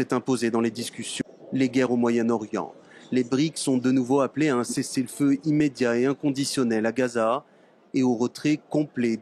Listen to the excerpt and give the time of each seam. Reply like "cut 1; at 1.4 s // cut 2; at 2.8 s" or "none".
cut 1; at 1.1 s